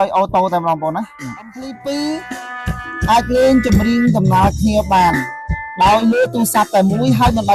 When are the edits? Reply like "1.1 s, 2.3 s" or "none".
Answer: 1.7 s